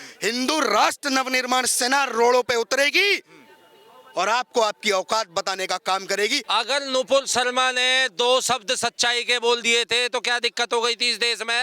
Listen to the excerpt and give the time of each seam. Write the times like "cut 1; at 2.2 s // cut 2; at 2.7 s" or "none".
cut 1; at 6.4 s